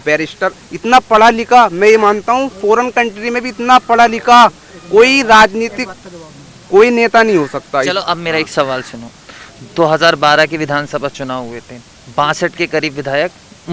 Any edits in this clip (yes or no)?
no